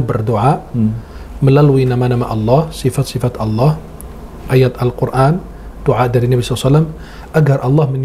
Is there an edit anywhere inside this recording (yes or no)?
no